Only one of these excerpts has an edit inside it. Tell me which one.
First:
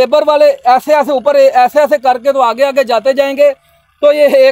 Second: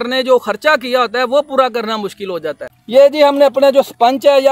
second; 1 cut; at 2.7 s

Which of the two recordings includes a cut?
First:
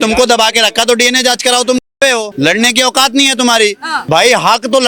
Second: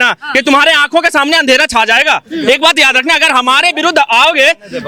first; 2 cuts; at 2.3 s, 3.9 s

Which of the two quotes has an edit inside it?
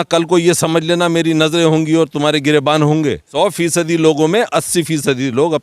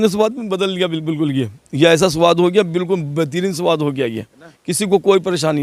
first; 1 cut; at 3.2 s

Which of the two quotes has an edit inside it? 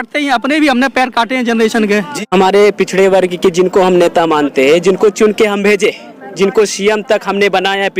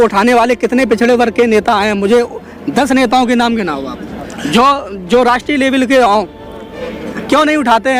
first; 1 cut; at 2.3 s

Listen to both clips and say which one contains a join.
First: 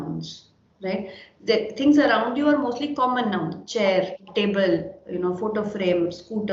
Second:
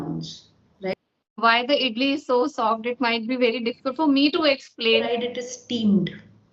second; 2 cuts; at 0.9 s, 5.1 s

